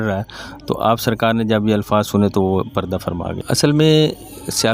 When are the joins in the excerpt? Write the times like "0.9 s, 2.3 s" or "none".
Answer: 3.3 s